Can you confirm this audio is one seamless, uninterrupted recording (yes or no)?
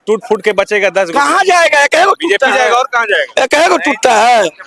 yes